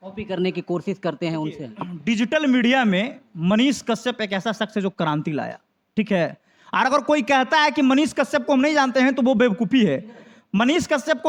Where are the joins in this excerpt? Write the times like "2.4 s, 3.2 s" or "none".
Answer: none